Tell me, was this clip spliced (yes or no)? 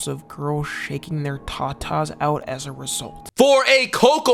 no